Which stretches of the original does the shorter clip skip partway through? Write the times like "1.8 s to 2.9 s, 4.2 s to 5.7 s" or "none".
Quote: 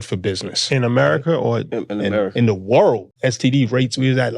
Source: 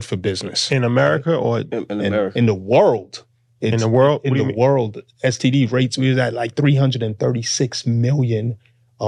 3.1 s to 5.1 s